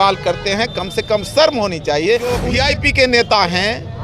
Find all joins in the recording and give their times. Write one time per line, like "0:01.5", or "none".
0:02.4